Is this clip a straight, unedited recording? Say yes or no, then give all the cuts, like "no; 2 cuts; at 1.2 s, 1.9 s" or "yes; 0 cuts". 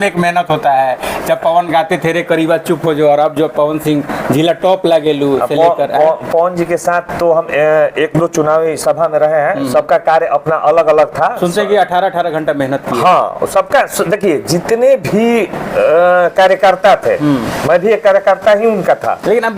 yes; 0 cuts